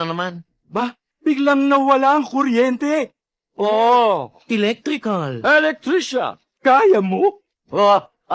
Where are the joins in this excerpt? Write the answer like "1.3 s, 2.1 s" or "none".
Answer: none

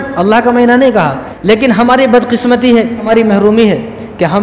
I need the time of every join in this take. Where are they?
1.3 s, 3.1 s

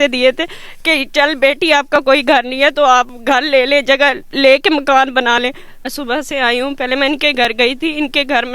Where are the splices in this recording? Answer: 5.7 s

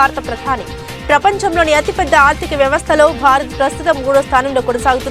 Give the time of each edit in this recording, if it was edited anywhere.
none

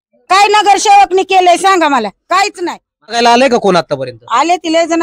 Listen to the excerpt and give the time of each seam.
3.1 s

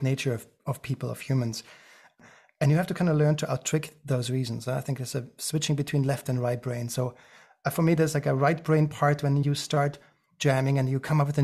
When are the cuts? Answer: 2.1 s

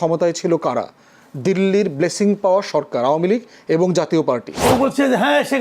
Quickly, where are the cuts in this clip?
4.6 s

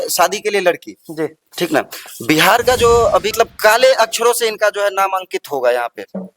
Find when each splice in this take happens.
3.3 s

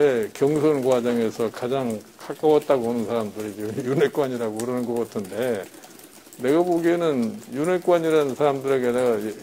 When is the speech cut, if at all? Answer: none

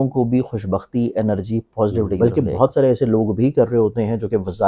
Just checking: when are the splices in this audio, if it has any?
2.1 s

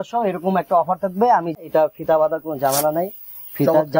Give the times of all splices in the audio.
1.6 s

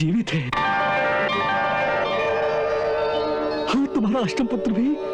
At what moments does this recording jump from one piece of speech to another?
none

